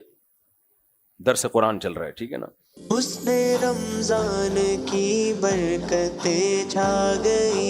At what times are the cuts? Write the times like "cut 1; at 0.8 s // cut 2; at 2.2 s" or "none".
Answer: cut 1; at 2.8 s